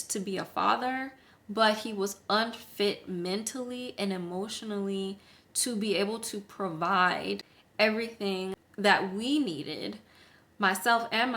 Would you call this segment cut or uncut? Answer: cut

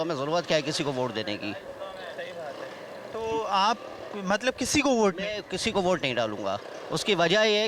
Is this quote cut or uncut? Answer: uncut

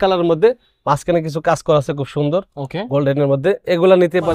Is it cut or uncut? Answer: uncut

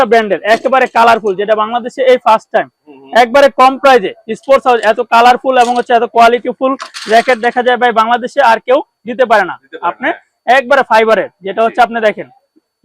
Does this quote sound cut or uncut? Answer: uncut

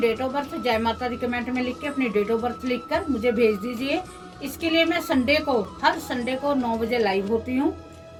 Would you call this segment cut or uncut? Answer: uncut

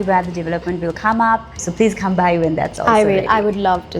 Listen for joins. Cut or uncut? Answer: cut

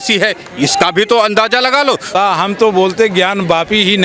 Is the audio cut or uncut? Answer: cut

